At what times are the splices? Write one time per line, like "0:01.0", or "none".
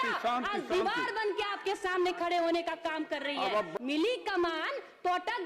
0:03.7